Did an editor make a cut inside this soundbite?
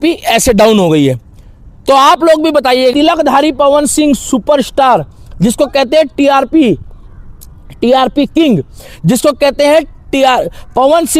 yes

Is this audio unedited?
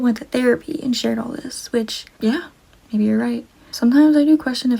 no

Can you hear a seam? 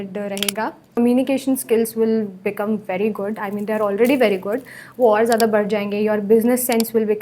yes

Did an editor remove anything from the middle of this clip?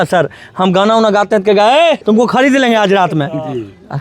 yes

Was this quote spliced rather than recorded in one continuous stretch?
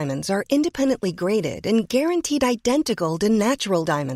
no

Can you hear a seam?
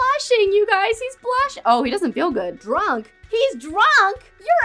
no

